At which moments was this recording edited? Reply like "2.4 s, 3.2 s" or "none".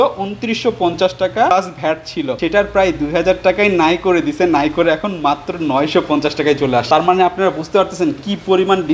none